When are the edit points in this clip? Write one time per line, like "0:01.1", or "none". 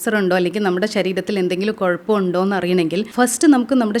0:03.1